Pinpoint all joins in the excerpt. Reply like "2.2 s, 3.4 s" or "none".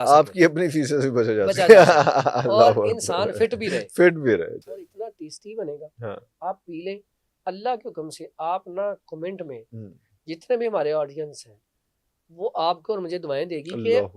4.6 s